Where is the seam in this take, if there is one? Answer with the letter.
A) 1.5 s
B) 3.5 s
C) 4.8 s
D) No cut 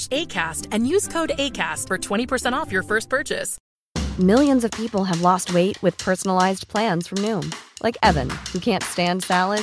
B